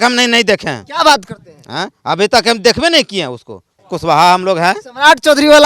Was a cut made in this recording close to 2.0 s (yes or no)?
no